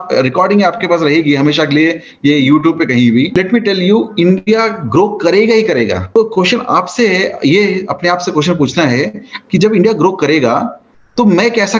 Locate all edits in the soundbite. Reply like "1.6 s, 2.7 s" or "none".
3.3 s, 6.0 s